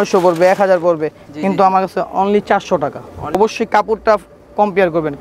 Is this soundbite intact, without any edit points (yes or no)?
no